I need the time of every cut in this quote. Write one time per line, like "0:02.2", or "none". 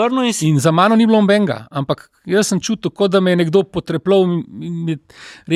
none